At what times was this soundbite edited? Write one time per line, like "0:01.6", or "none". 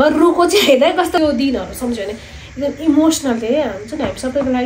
0:01.2